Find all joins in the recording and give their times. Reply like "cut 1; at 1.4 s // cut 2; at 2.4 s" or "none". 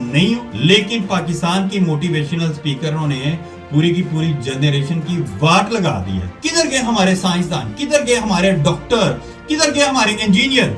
none